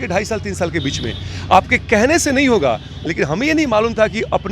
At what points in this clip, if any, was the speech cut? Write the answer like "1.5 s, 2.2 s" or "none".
3.0 s